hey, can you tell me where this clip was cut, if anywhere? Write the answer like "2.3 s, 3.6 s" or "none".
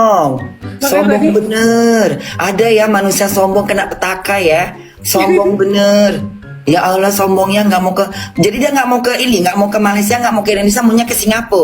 1.0 s